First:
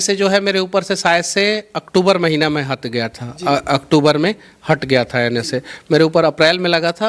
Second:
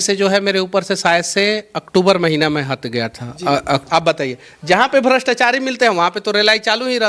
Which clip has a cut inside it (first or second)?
second